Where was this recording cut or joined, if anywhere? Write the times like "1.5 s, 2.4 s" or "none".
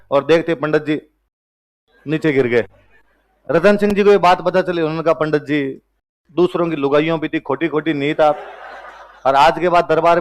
none